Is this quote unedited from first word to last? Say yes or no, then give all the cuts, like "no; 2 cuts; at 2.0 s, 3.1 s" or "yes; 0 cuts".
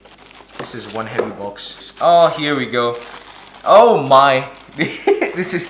no; 1 cut; at 1.8 s